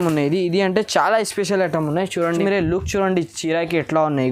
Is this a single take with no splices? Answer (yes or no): no